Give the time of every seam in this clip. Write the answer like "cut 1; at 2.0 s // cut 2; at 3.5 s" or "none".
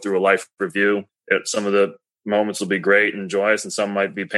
cut 1; at 1.1 s